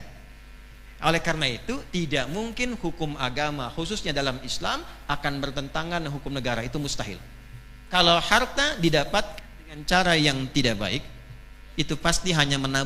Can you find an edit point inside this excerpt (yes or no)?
yes